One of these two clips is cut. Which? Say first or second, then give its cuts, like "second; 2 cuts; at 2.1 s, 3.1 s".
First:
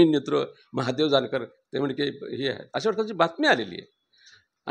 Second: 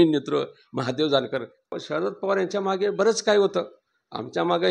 second; 1 cut; at 1.7 s